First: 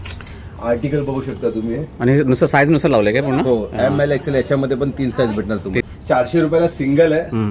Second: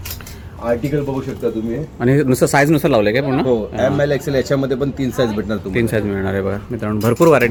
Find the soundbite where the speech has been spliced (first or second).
first